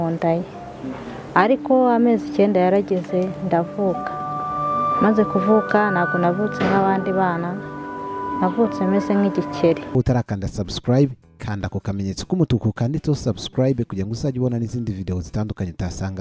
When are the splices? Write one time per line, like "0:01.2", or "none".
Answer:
0:10.0